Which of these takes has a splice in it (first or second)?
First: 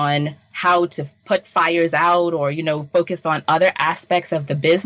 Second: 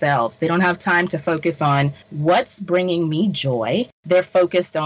second